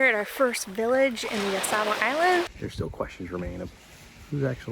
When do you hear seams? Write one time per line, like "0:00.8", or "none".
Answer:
0:02.5